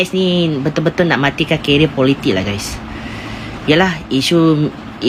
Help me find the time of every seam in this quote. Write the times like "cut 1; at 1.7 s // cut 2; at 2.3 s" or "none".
none